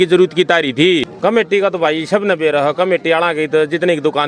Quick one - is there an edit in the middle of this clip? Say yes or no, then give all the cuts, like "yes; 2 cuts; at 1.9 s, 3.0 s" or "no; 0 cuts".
yes; 1 cut; at 1.1 s